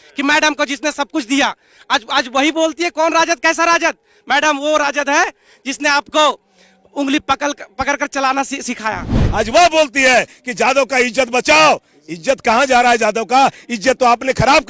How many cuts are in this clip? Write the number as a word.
one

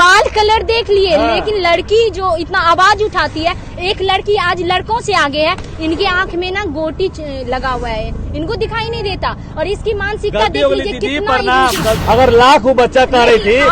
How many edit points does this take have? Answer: one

